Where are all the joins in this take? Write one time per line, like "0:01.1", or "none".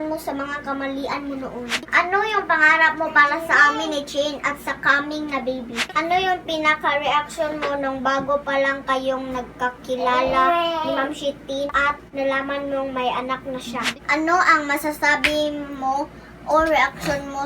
0:01.9
0:05.9
0:11.9
0:14.0

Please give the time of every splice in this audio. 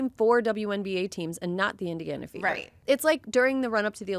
0:02.7

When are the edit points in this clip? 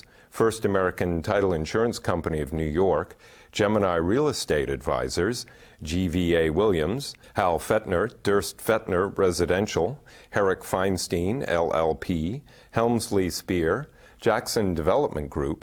none

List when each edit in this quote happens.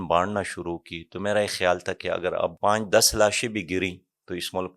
0:02.6

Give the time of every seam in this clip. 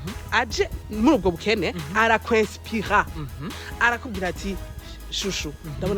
none

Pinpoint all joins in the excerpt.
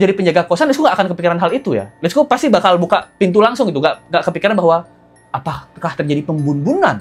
none

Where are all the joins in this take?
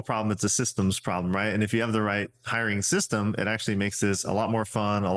none

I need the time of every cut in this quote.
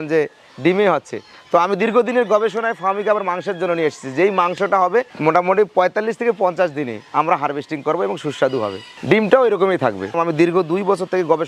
0:10.2

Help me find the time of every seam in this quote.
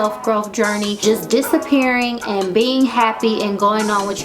0:01.0

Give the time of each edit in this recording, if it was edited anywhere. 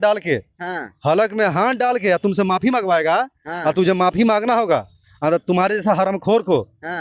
none

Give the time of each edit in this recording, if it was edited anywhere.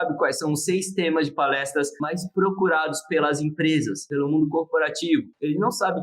0:02.0

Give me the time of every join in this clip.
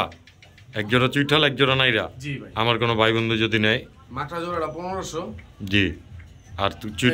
none

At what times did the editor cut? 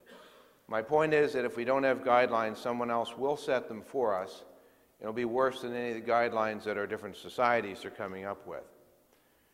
0:02.3

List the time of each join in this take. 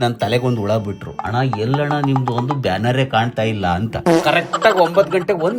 0:03.9

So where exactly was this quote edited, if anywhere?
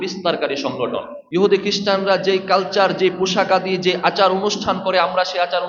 0:01.1

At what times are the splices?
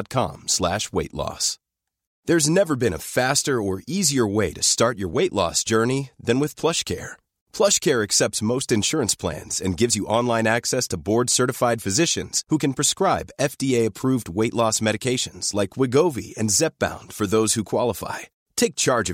0:02.1

